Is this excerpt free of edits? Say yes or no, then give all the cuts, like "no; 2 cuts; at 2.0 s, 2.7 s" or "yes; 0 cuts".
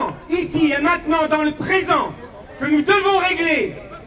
yes; 0 cuts